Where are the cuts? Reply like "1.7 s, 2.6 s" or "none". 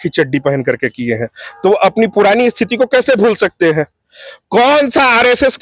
none